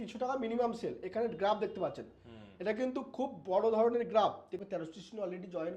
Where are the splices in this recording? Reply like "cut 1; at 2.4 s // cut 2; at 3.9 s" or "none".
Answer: cut 1; at 4.6 s